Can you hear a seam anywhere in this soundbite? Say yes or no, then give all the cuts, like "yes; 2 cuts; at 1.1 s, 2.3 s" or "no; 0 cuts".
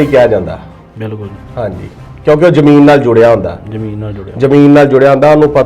no; 0 cuts